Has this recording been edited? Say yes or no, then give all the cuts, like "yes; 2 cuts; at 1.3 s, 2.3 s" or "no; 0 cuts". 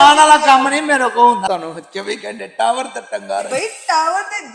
yes; 1 cut; at 1.5 s